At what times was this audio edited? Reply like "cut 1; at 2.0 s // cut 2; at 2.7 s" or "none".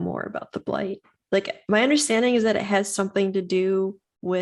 cut 1; at 1.1 s